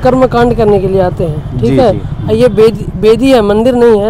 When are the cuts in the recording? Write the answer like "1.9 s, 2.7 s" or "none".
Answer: none